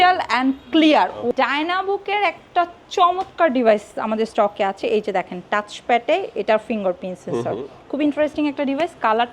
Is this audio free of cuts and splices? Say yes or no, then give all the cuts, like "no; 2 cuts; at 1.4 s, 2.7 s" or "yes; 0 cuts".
no; 1 cut; at 1.3 s